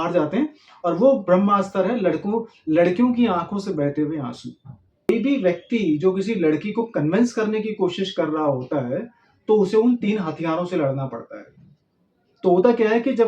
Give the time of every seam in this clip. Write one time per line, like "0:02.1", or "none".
0:05.1